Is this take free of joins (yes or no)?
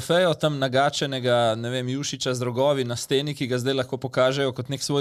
yes